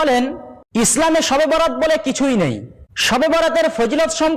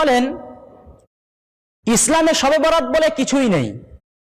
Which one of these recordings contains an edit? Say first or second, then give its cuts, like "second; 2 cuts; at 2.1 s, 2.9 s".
first; 2 cuts; at 0.9 s, 3.2 s